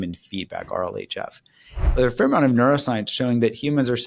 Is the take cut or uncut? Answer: cut